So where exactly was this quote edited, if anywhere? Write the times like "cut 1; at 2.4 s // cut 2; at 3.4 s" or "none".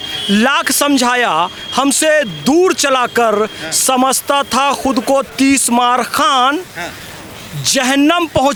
none